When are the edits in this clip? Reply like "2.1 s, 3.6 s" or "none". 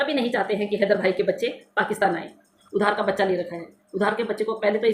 2.5 s